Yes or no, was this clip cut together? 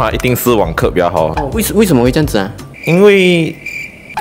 no